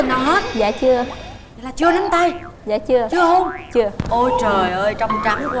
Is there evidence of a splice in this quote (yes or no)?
no